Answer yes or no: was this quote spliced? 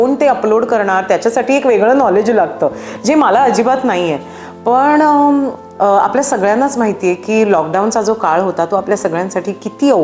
no